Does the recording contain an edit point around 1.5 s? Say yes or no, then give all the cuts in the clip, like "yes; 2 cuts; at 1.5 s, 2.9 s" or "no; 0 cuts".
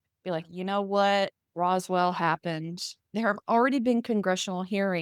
no; 1 cut; at 3.0 s